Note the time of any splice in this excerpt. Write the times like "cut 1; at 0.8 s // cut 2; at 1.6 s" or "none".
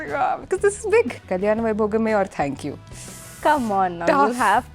cut 1; at 1.2 s

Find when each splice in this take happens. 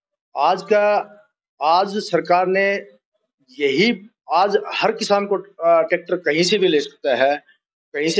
none

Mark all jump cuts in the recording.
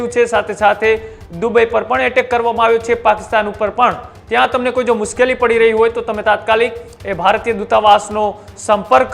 cut 1; at 4.1 s

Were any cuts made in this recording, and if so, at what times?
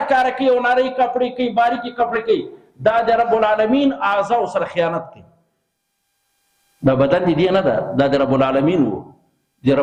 none

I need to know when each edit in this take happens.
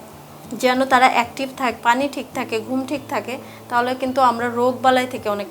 cut 1; at 1.8 s

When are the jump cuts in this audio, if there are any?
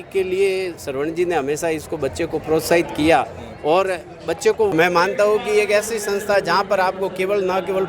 cut 1; at 4.7 s

